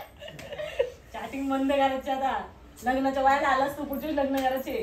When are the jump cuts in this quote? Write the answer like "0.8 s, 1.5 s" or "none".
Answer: none